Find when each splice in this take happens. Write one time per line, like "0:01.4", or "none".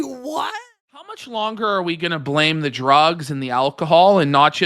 0:01.1